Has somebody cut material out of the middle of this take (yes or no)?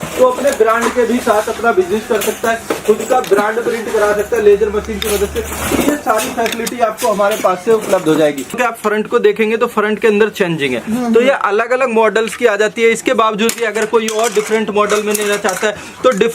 yes